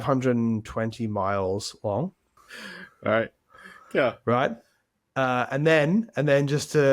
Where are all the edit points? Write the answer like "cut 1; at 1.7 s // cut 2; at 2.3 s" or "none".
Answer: none